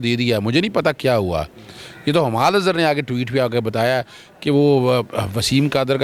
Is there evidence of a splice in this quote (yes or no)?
no